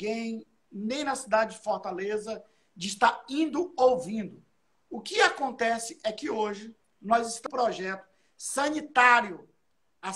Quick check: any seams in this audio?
yes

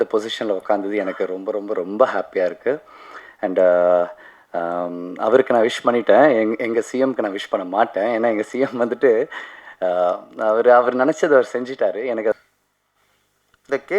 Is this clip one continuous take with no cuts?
no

